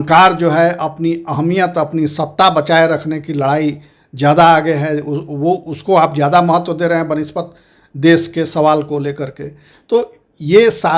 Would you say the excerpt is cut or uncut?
uncut